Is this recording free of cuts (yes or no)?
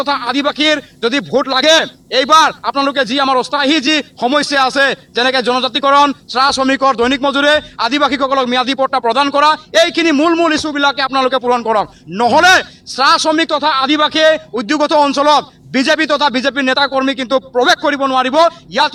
yes